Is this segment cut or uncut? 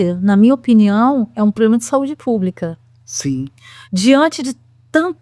uncut